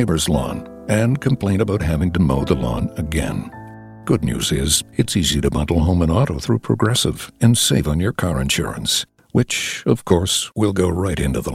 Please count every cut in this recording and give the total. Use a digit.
0